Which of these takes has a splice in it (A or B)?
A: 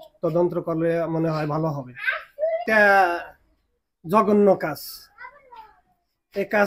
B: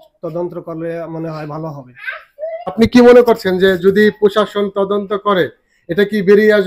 A